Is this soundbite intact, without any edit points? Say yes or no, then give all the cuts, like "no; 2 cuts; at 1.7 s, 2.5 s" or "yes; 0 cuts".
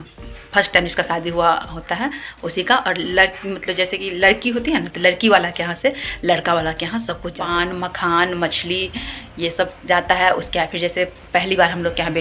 no; 1 cut; at 7.3 s